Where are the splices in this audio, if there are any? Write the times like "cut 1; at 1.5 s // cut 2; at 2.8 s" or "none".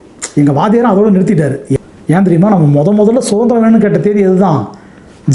cut 1; at 1.7 s